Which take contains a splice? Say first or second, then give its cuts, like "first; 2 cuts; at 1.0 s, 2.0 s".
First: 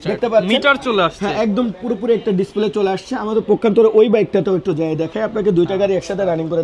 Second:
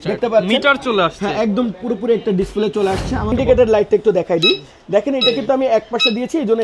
second; 1 cut; at 3.3 s